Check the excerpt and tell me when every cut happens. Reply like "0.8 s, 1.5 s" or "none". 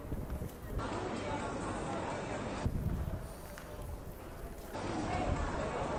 none